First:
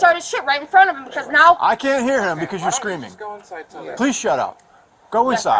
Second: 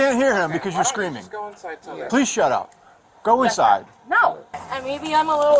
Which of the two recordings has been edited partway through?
second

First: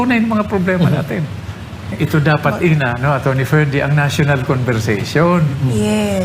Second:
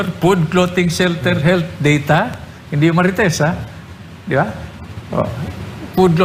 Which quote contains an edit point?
first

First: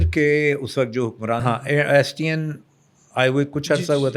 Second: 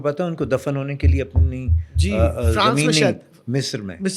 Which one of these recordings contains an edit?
first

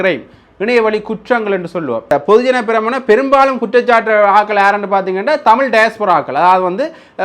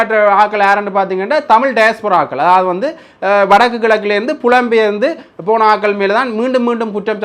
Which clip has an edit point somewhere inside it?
first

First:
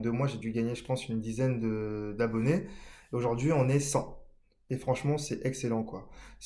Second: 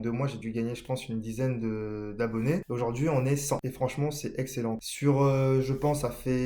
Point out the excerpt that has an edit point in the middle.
second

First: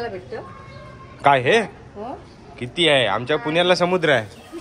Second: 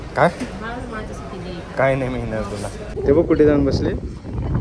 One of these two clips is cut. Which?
second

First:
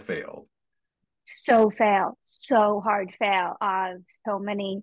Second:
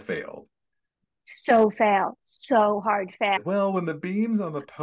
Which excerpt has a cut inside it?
second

